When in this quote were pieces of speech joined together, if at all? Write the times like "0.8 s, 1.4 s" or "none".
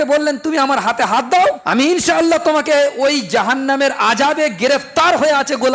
1.6 s